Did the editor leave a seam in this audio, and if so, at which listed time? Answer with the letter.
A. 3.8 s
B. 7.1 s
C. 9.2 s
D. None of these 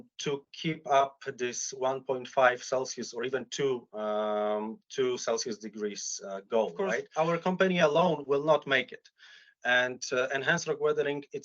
B